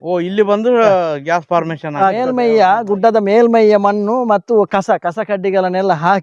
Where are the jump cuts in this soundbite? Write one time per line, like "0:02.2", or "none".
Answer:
0:02.2

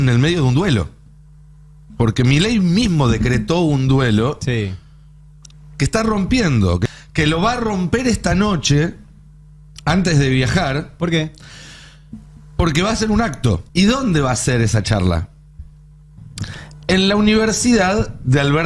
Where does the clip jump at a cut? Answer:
0:06.8
0:13.6

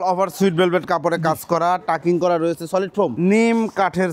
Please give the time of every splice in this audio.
0:03.1

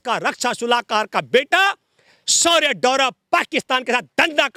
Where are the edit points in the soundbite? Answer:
none

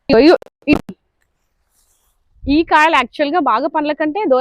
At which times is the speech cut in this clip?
none

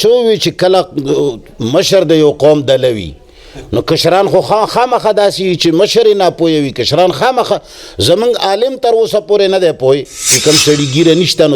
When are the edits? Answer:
0:10.3

